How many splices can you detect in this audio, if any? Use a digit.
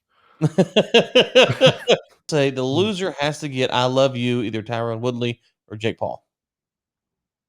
1